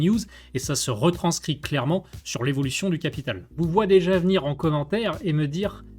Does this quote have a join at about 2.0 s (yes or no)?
no